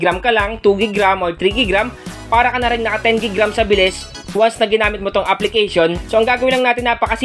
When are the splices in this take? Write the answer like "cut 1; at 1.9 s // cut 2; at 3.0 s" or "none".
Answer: cut 1; at 6.0 s